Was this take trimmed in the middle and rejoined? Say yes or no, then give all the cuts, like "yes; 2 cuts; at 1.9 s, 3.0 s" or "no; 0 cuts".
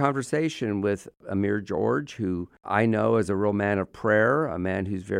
yes; 2 cuts; at 1.2 s, 2.5 s